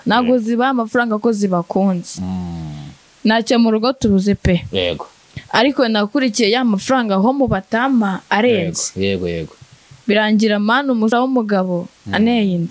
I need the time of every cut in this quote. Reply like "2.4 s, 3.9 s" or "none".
none